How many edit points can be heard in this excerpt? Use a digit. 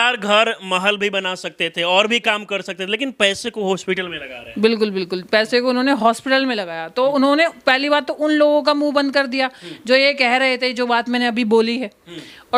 0